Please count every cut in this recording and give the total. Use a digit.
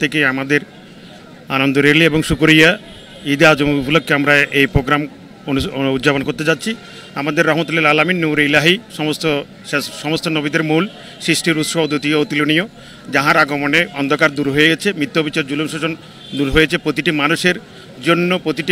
0